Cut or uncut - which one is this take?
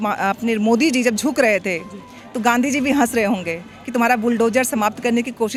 uncut